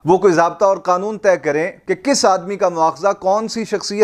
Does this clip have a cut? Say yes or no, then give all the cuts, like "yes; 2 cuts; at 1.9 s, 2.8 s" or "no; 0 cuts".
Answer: no; 0 cuts